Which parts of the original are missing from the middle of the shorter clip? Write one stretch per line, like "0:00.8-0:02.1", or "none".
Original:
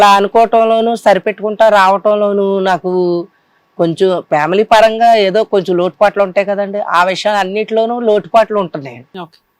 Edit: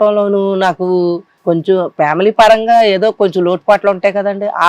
0:03.3-0:03.6